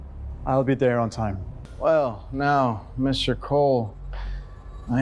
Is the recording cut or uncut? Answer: cut